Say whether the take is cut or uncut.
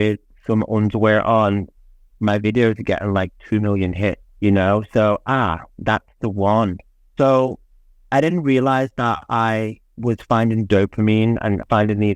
uncut